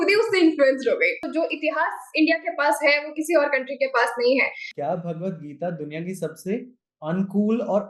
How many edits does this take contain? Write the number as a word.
two